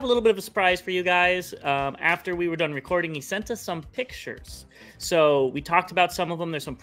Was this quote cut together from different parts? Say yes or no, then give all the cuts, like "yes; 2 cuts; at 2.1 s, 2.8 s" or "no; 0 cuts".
no; 0 cuts